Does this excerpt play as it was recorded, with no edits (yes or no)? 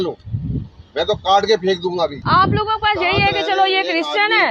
no